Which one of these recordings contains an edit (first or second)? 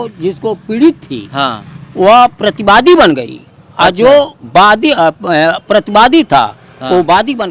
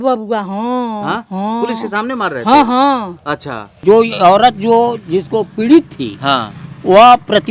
second